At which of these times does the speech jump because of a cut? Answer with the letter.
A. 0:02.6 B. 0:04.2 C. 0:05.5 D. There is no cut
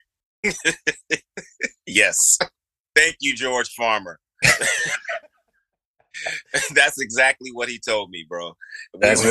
A